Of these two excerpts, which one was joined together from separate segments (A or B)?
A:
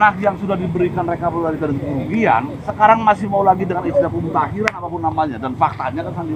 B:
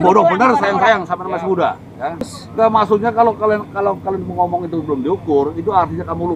B